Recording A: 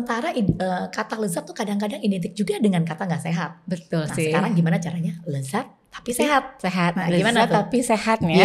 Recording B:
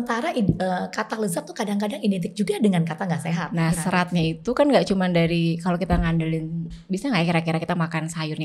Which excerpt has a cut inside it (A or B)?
B